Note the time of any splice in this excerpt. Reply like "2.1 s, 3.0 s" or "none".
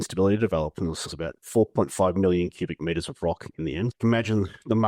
1.1 s

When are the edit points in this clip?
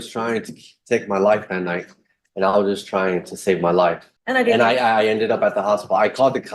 4.1 s

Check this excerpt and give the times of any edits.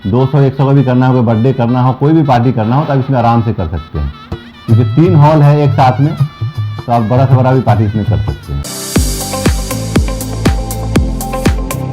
8.6 s

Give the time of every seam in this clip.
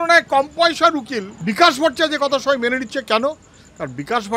1.3 s

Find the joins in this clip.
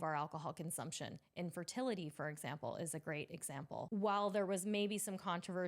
3.9 s

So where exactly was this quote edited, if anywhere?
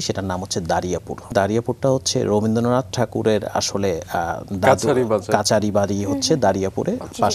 1.3 s

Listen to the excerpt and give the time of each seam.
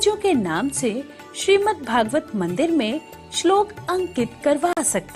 none

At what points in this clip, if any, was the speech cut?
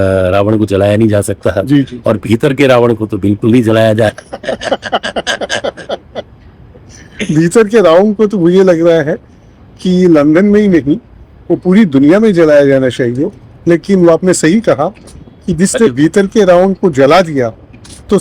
none

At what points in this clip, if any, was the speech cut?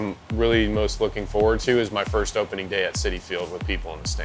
none

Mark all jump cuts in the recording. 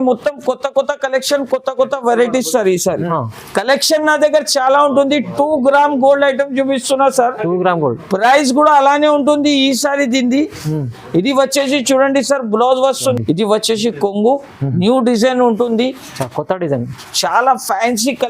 3.1 s, 13.2 s

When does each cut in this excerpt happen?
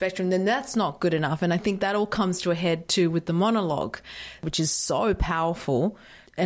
none

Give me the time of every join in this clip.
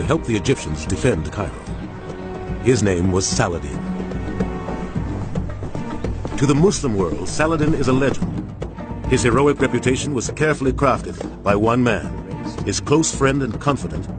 5.9 s

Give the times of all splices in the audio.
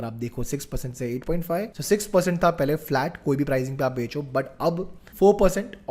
1.7 s

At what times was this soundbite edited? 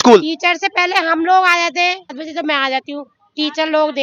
2.2 s

